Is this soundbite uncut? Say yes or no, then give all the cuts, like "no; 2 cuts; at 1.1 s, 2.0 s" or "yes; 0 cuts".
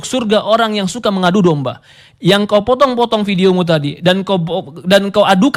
yes; 0 cuts